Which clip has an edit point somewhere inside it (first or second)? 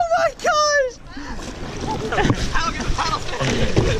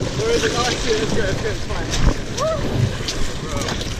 first